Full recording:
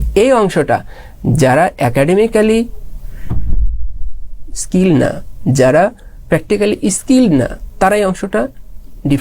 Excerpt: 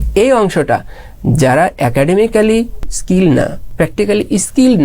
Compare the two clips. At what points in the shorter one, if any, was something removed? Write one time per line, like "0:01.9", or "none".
0:02.9
0:03.6